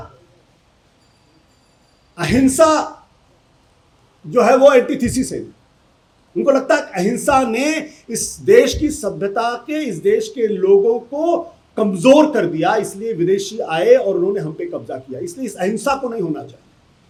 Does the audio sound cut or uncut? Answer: uncut